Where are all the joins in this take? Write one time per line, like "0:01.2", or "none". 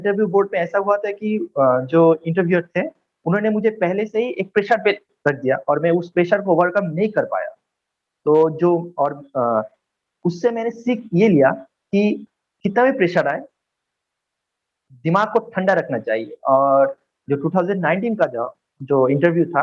none